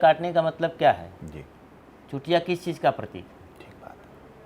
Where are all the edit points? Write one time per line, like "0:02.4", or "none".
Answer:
none